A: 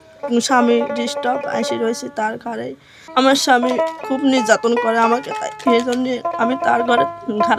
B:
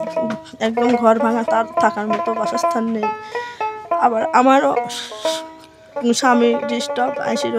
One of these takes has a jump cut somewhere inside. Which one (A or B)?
A